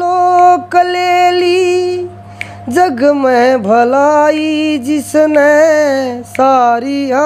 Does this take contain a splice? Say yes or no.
no